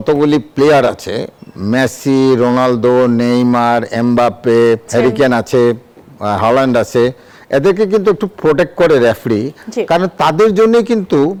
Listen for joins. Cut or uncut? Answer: uncut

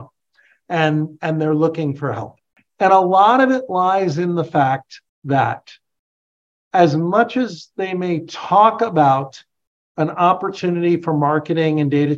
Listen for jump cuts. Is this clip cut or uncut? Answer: uncut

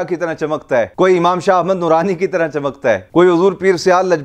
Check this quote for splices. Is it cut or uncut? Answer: uncut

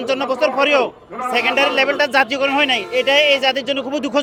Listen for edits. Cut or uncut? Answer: uncut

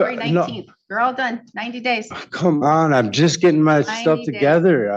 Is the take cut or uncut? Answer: uncut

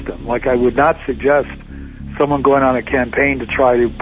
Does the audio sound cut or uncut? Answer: uncut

